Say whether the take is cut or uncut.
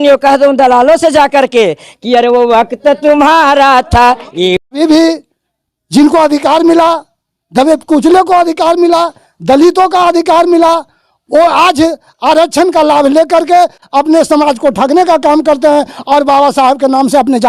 cut